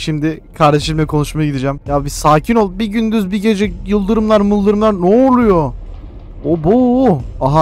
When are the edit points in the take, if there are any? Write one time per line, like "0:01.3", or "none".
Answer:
0:01.8